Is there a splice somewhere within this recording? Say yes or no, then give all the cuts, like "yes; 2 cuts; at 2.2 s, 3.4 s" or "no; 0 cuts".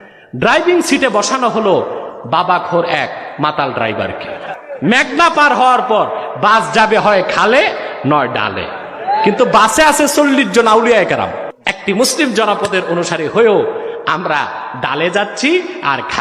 yes; 2 cuts; at 4.5 s, 11.5 s